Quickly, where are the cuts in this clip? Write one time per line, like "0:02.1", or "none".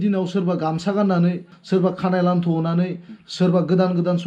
0:01.6